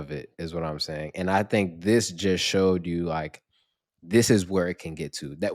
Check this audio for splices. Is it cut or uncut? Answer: uncut